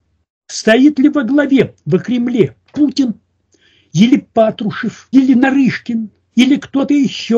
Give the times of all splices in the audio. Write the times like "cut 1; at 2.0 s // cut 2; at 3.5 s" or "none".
cut 1; at 5.0 s